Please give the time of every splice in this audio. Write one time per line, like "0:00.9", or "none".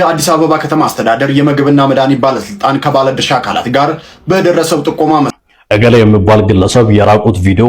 0:05.3